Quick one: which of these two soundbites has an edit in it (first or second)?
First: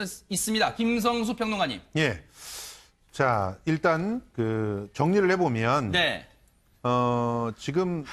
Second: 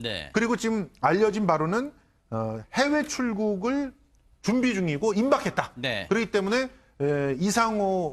first